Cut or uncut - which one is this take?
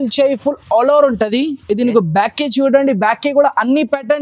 uncut